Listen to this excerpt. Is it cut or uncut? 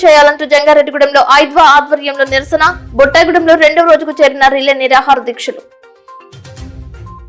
uncut